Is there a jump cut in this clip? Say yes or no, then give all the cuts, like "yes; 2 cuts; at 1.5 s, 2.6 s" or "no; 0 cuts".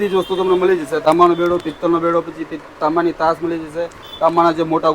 yes; 1 cut; at 1.0 s